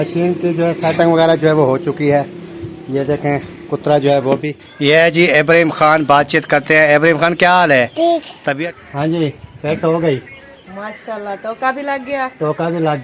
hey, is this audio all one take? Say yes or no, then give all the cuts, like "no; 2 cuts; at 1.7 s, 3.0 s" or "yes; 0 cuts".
no; 2 cuts; at 4.3 s, 8.4 s